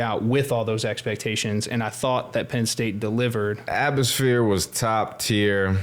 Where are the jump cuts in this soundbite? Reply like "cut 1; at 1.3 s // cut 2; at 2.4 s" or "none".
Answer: cut 1; at 3.7 s